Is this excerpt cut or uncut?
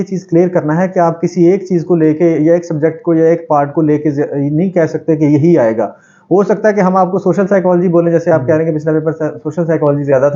uncut